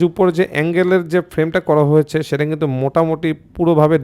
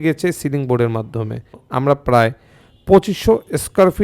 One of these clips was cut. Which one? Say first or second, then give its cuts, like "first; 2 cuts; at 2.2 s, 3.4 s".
second; 1 cut; at 1.6 s